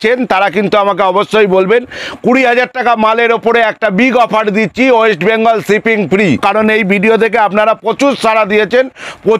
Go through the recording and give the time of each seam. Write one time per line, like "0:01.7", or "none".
0:06.4